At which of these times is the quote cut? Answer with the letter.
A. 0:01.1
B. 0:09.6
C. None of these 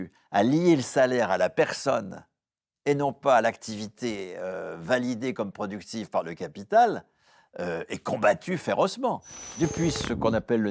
B